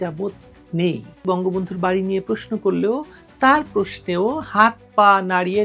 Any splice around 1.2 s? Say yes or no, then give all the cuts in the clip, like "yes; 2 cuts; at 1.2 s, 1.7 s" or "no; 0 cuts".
yes; 1 cut; at 1.2 s